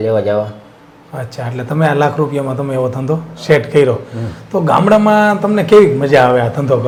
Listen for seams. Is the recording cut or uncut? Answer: uncut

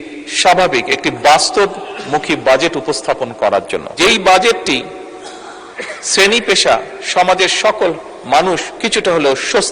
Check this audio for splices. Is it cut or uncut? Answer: cut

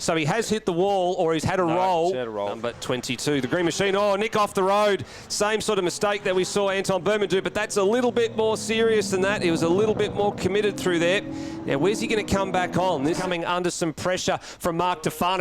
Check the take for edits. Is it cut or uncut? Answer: cut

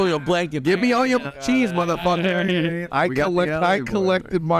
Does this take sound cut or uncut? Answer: cut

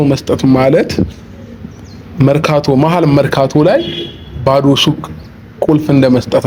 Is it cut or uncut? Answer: uncut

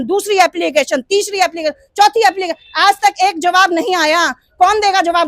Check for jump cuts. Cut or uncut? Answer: uncut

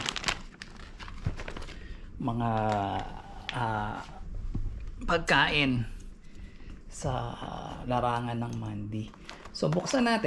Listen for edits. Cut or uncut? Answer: uncut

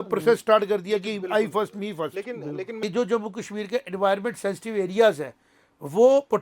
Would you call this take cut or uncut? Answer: cut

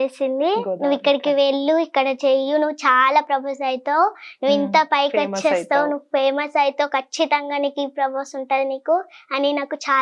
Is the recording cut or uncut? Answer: uncut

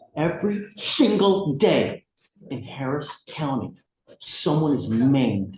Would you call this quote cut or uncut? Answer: uncut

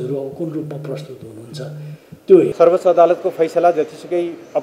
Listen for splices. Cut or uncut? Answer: cut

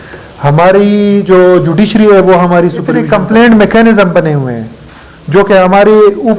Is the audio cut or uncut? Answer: cut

